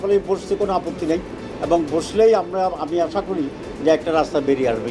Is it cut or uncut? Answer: uncut